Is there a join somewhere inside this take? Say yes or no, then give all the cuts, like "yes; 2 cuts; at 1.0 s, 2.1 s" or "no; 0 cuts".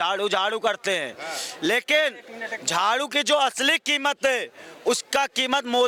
no; 0 cuts